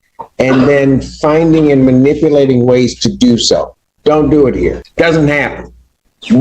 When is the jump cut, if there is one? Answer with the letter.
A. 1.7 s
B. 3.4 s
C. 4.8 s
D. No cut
C